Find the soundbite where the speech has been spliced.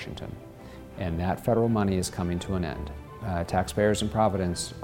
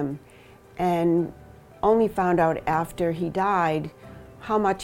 first; 1 cut; at 3.2 s

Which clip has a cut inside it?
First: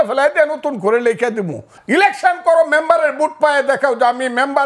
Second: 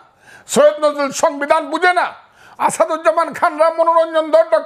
first; 1 cut; at 1.7 s

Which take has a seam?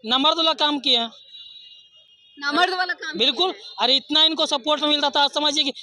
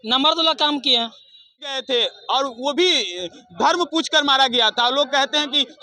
second; 1 cut; at 1.8 s

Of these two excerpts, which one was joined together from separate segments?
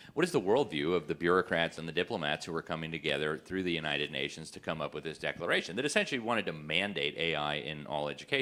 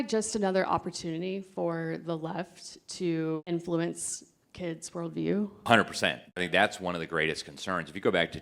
second; 3 cuts; at 3.4 s, 5.7 s, 6.4 s

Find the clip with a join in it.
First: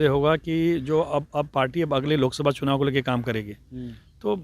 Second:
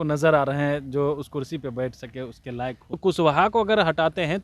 second; 1 cut; at 2.8 s

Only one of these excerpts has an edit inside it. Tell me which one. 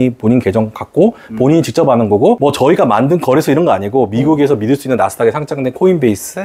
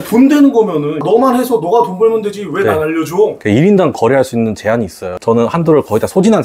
second; 2 cuts; at 3.4 s, 5.2 s

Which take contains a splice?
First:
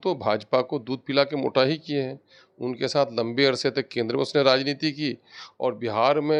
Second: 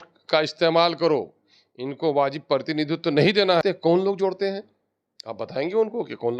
second; 1 cut; at 3.6 s

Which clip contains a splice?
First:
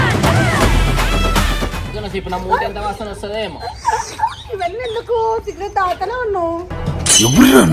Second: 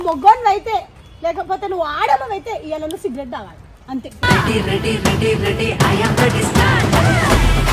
first; 1 cut; at 2.0 s

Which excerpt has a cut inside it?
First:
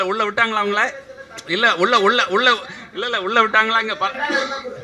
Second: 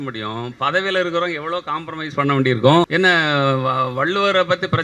second; 1 cut; at 2.9 s

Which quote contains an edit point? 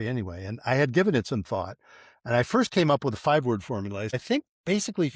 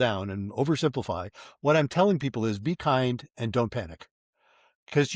first; 1 cut; at 4.1 s

